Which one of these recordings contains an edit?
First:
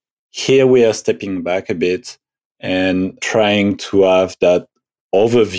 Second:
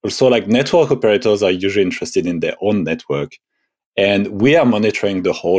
first; 1 cut; at 3.2 s

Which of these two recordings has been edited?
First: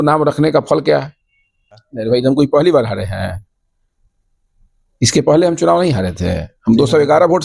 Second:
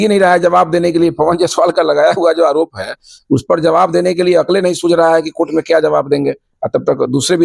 first; 1 cut; at 1.9 s

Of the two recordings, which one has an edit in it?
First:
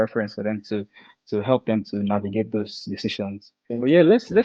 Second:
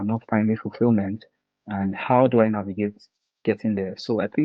first; 1 cut; at 3.5 s

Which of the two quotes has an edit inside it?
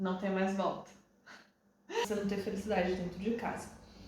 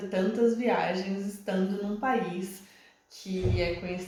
first; 1 cut; at 2.0 s

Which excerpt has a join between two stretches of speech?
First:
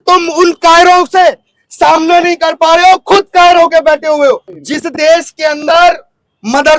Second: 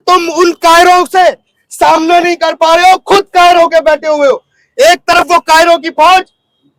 first; 1 cut; at 4.6 s

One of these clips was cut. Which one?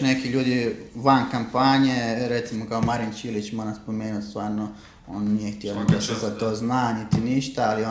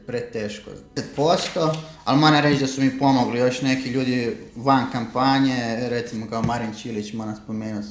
second; 1 cut; at 1.0 s

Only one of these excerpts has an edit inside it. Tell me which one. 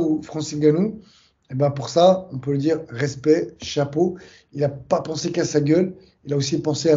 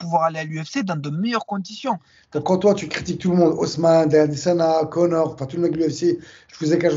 second; 1 cut; at 2.1 s

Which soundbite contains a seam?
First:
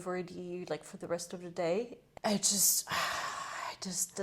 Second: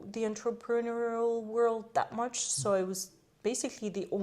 first; 1 cut; at 2.0 s

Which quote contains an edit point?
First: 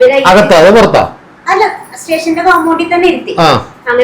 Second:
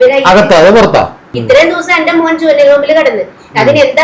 second; 1 cut; at 1.3 s

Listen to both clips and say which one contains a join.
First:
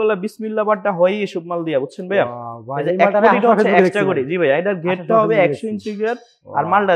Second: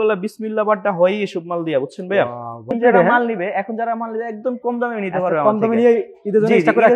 second; 1 cut; at 2.7 s

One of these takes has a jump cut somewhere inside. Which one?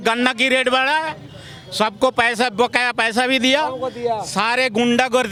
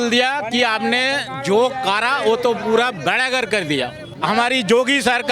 second; 1 cut; at 4.1 s

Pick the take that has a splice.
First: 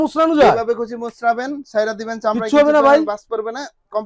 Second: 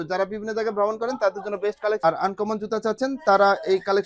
second; 1 cut; at 2.1 s

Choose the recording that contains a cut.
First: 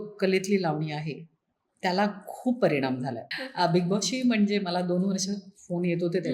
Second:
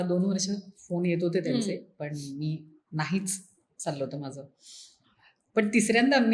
first; 1 cut; at 3.2 s

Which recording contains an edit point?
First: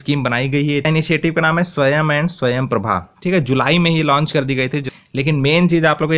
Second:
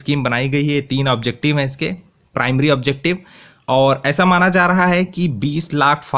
first; 2 cuts; at 0.9 s, 4.8 s

